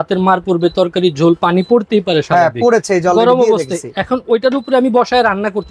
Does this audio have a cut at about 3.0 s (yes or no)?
no